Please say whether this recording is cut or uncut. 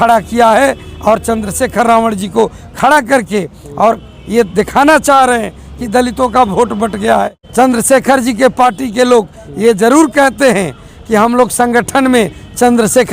cut